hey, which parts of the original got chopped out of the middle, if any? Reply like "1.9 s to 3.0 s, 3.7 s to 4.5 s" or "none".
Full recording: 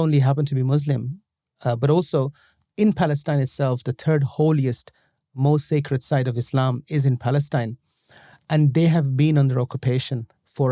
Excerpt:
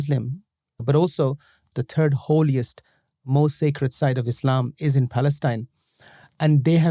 1.6 s to 1.8 s, 2.7 s to 3.8 s